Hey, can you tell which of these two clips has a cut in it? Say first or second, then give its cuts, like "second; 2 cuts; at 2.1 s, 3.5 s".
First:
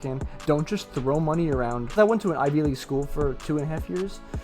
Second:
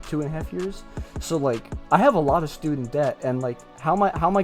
first; 1 cut; at 1.9 s